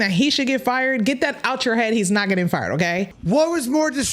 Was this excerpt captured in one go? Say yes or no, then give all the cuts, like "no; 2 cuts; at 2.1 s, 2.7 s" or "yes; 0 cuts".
no; 1 cut; at 3.1 s